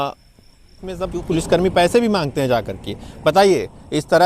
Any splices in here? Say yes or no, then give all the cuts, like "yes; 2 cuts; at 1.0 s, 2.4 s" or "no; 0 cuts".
yes; 1 cut; at 1.0 s